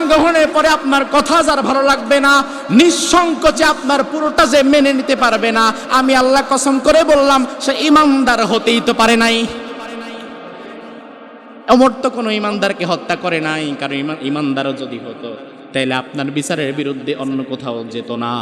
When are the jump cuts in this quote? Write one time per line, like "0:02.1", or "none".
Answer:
none